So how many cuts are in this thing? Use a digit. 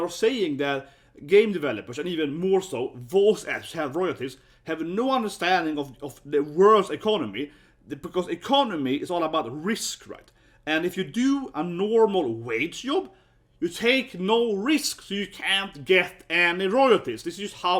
0